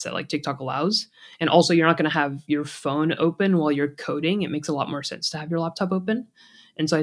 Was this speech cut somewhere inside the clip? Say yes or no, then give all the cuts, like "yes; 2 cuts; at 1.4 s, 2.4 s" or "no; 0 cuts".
no; 0 cuts